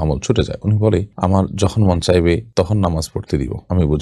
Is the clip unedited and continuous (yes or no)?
no